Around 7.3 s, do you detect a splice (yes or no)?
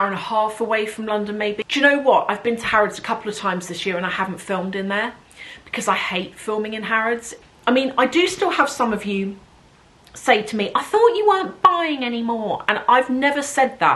yes